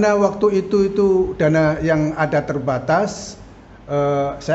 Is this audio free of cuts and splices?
yes; 0 cuts

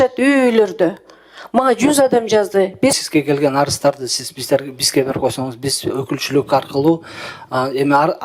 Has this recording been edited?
yes; 1 cut; at 3.0 s

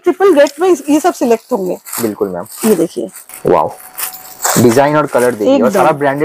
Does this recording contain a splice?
no; 0 cuts

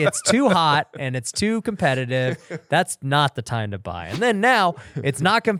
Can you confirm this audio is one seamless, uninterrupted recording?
yes; 0 cuts

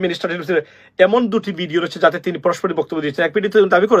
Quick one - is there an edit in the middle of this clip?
yes; 1 cut; at 2.6 s

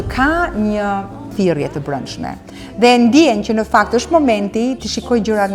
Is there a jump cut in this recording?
yes; 1 cut; at 1.3 s

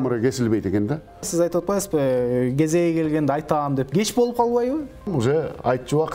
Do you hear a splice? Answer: yes; 2 cuts; at 1.3 s, 5.1 s

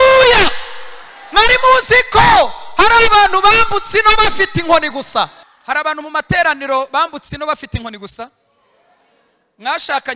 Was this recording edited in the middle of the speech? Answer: yes; 1 cut; at 5.5 s

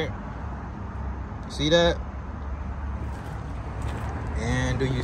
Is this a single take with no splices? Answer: yes; 0 cuts

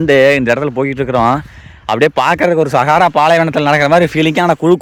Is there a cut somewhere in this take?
no; 0 cuts

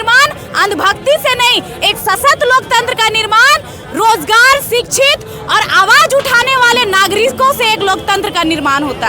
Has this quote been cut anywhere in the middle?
no; 0 cuts

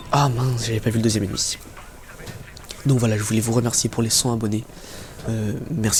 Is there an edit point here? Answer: no; 0 cuts

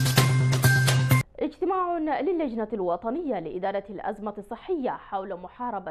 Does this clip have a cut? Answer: yes; 1 cut; at 1.1 s

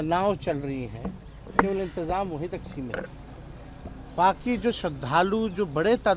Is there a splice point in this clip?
no; 0 cuts

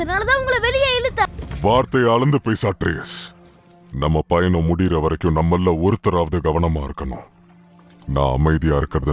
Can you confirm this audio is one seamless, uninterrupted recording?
no; 1 cut; at 1.3 s

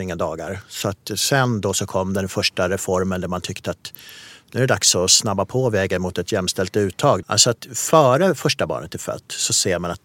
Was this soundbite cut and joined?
yes; 1 cut; at 7.2 s

